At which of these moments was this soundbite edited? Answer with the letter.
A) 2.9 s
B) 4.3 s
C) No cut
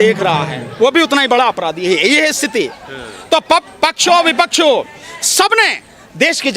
C